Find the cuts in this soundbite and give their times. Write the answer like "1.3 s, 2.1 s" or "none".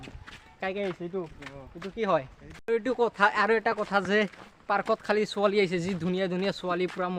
2.5 s